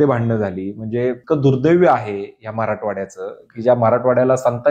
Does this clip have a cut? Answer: yes; 1 cut; at 1.2 s

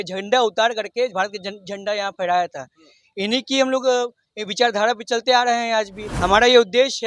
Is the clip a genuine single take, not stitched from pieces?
no; 1 cut; at 6.0 s

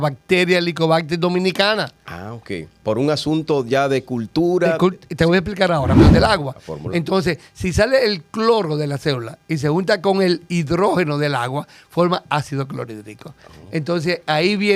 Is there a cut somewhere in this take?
yes; 1 cut; at 6.0 s

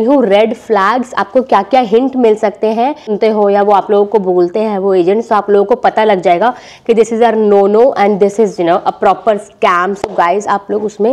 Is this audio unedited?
yes; 0 cuts

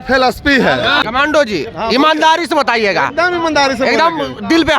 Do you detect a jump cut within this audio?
yes; 1 cut; at 1.0 s

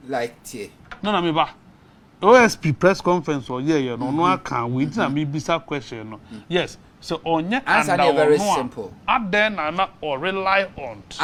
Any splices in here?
no; 0 cuts

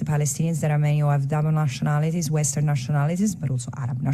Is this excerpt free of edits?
yes; 0 cuts

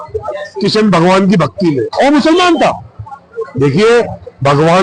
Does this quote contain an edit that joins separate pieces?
no; 0 cuts

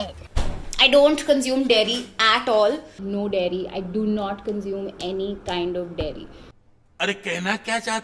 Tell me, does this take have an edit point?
no; 0 cuts

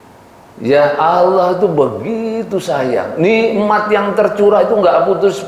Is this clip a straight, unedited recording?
yes; 0 cuts

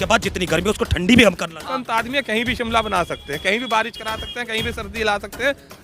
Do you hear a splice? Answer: yes; 1 cut; at 1.7 s

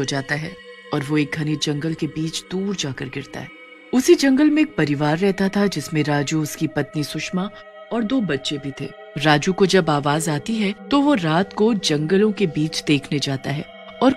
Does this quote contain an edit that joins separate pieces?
no; 0 cuts

